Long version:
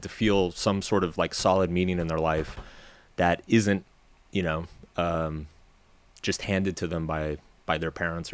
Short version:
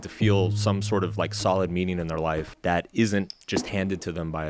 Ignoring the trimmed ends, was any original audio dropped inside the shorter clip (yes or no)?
yes